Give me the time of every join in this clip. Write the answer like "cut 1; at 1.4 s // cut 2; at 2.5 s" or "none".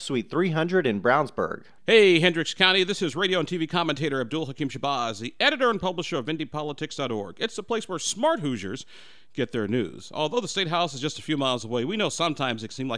cut 1; at 1.7 s